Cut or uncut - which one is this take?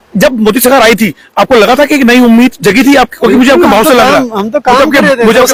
uncut